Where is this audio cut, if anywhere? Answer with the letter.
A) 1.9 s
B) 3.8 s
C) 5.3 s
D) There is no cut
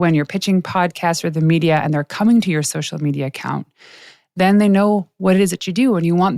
D